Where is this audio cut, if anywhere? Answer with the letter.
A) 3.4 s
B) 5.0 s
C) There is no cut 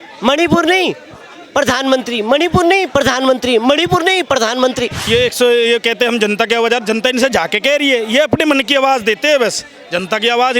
B